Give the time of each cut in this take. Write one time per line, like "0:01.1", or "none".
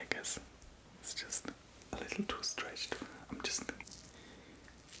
0:03.9